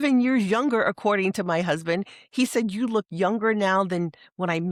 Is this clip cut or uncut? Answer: uncut